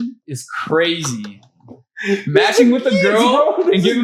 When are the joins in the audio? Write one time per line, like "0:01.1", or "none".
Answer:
none